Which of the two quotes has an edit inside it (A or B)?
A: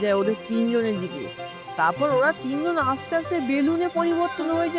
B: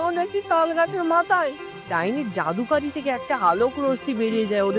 B